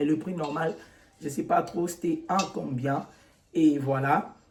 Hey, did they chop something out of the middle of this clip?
no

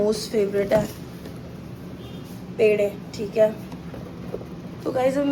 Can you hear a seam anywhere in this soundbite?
no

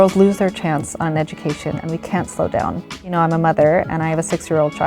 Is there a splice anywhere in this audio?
yes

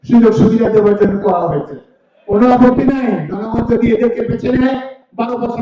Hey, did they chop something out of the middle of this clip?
no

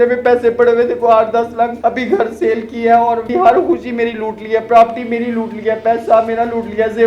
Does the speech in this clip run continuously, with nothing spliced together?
no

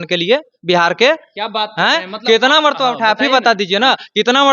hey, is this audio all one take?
yes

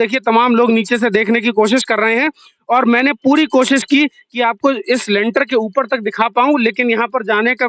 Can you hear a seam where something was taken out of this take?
no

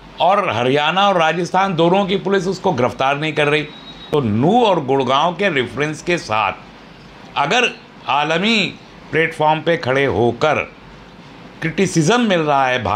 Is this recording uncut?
no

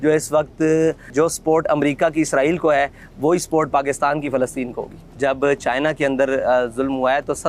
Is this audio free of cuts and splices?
no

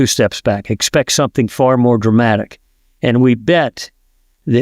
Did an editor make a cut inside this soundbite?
no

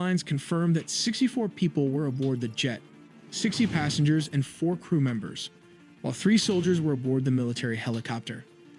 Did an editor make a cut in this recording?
no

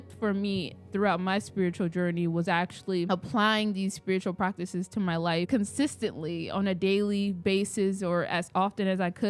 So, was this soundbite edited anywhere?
no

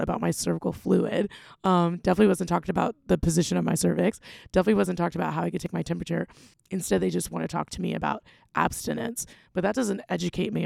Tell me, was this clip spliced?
yes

